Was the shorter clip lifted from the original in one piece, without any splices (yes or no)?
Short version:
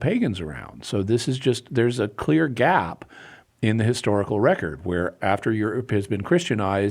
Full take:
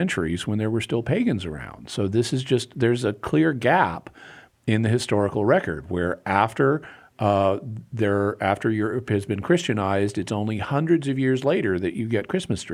no